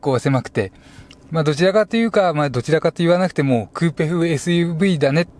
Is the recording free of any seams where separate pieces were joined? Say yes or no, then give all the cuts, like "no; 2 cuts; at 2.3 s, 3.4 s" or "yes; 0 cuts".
yes; 0 cuts